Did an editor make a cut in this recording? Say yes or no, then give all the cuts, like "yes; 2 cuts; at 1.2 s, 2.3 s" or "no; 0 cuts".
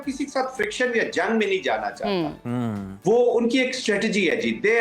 no; 0 cuts